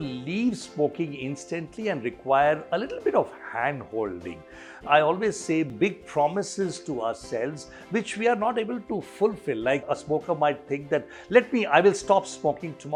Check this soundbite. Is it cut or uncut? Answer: uncut